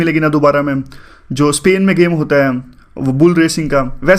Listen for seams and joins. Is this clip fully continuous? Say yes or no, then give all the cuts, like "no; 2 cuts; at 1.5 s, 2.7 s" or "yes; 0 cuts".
yes; 0 cuts